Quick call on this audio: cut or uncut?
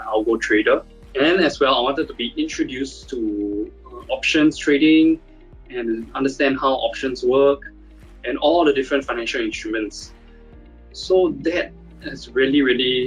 cut